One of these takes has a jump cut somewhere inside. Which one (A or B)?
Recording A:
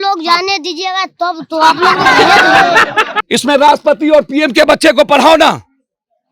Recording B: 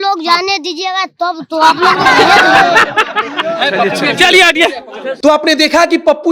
A